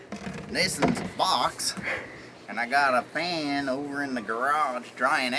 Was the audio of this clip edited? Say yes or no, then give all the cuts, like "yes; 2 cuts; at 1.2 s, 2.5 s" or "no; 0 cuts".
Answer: no; 0 cuts